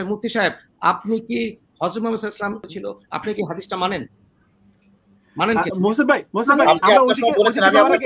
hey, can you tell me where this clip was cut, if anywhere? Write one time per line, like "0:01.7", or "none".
0:02.7